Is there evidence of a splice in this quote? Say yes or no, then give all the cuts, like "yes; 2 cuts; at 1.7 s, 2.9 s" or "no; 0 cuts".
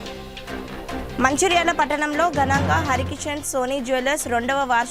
yes; 1 cut; at 1.0 s